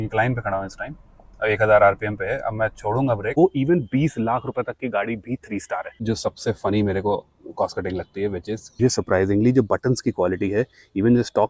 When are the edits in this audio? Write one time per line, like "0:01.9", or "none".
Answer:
0:03.3
0:06.0
0:08.8